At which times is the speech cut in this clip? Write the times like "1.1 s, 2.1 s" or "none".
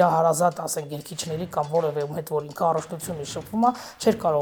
none